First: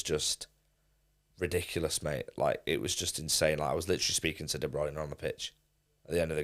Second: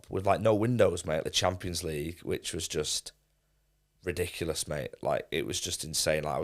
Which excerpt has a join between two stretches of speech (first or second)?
second